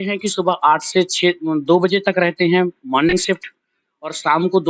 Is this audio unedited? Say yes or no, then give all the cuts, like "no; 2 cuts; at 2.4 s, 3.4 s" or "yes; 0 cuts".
yes; 0 cuts